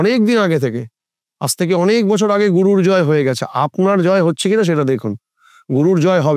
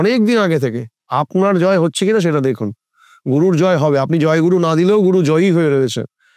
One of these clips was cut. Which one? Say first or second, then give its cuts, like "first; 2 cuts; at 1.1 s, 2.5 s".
second; 1 cut; at 1.0 s